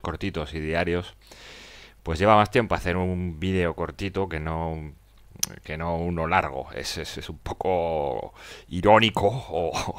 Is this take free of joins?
no; 1 cut; at 2.5 s

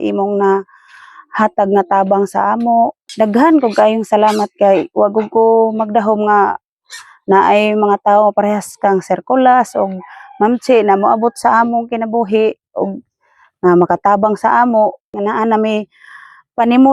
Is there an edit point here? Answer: yes; 2 cuts; at 3.0 s, 15.1 s

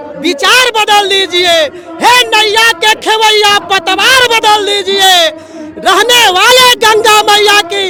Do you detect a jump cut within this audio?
no; 0 cuts

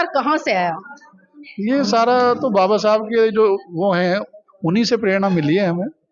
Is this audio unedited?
yes; 0 cuts

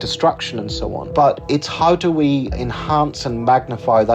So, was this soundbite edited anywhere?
yes; 2 cuts; at 1.0 s, 2.6 s

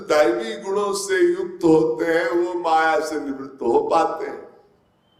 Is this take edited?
no; 0 cuts

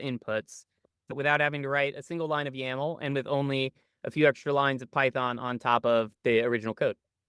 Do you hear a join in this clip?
yes; 2 cuts; at 1.1 s, 6.1 s

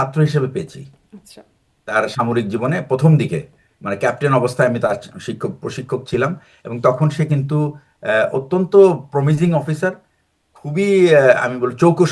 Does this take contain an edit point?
no; 0 cuts

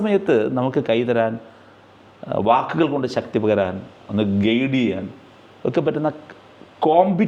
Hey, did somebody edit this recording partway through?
no; 0 cuts

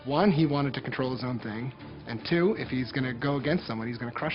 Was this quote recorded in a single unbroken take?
yes; 0 cuts

